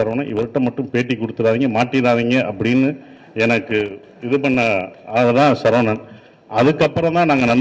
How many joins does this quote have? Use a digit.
0